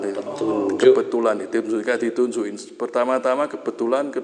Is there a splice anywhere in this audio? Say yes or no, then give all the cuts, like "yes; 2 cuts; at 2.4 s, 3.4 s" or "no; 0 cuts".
no; 0 cuts